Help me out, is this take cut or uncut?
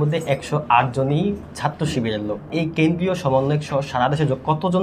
cut